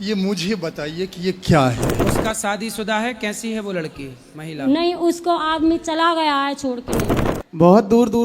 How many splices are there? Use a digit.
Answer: 2